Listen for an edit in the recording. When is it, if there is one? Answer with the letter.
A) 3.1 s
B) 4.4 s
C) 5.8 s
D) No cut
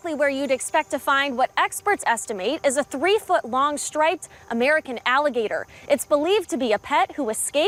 D